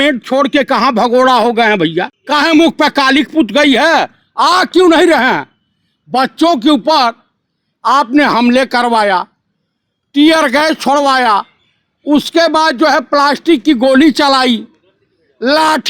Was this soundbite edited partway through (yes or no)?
yes